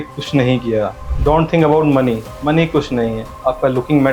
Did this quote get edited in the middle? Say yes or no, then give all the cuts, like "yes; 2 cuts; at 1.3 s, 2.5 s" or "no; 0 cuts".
yes; 1 cut; at 1.0 s